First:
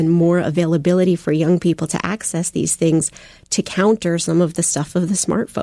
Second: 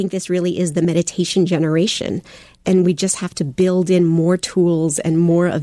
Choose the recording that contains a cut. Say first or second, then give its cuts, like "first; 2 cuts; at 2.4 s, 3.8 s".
second; 2 cuts; at 0.9 s, 2.6 s